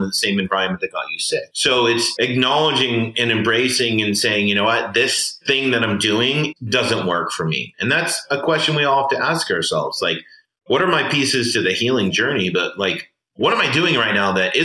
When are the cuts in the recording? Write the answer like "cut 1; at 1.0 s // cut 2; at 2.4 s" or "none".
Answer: cut 1; at 2.1 s // cut 2; at 5.3 s // cut 3; at 6.5 s